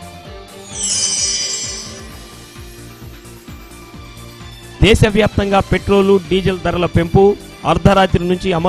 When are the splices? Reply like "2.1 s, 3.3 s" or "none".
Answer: none